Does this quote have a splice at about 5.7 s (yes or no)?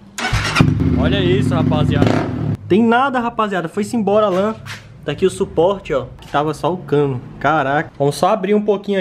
no